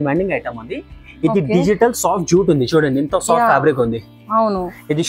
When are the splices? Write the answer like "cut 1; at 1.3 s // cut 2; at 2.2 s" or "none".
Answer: none